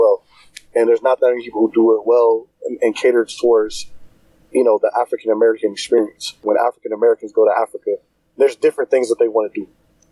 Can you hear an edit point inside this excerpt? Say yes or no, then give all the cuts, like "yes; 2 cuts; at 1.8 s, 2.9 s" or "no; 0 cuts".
yes; 1 cut; at 6.4 s